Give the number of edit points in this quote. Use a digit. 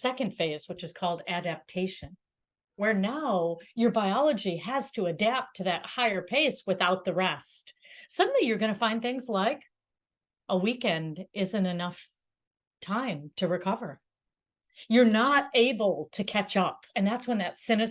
1